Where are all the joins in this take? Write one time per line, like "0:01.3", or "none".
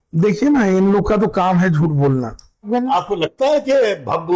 0:02.7